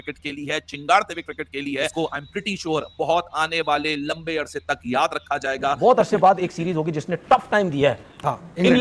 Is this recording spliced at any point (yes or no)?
yes